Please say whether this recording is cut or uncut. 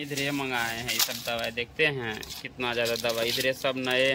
uncut